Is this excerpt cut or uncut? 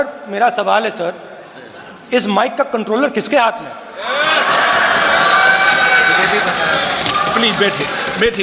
uncut